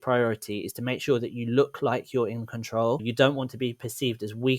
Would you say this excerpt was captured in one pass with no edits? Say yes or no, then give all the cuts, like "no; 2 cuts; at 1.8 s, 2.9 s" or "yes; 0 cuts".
no; 1 cut; at 3.1 s